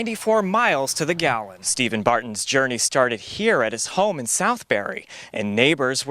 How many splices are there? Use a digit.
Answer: 1